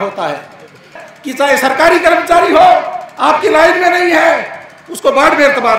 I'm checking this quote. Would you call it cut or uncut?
cut